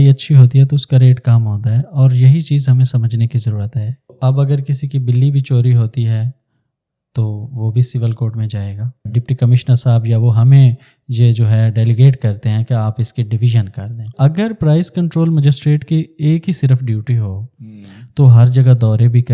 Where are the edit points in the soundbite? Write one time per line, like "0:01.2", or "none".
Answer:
0:04.1
0:09.1
0:14.1